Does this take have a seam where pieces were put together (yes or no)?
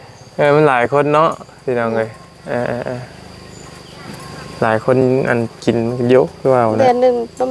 no